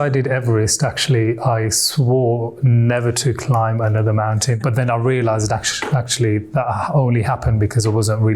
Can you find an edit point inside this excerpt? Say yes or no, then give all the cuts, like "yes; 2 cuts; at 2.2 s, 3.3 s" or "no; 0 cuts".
yes; 1 cut; at 4.6 s